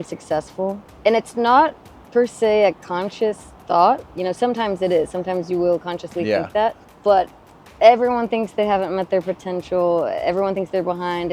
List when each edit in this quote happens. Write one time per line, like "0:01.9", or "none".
none